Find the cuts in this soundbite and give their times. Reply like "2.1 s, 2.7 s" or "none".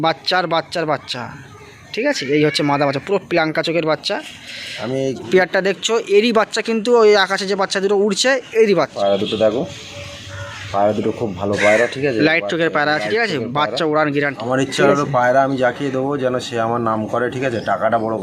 5.3 s, 8.9 s, 14.4 s